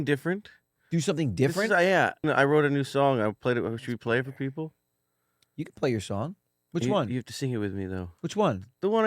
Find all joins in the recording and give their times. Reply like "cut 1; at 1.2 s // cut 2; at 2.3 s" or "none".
cut 1; at 2.2 s